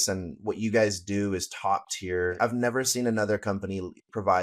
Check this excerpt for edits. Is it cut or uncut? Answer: cut